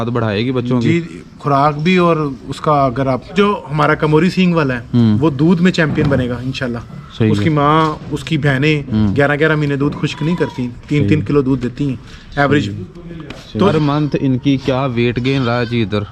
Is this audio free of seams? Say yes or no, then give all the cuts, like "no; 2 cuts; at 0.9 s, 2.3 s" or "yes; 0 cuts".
no; 2 cuts; at 3.3 s, 13.7 s